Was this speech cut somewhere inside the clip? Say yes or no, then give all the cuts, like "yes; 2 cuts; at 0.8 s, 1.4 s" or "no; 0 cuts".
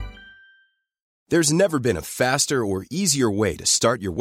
yes; 1 cut; at 1.1 s